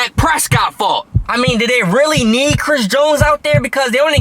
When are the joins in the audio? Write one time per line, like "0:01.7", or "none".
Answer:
0:01.2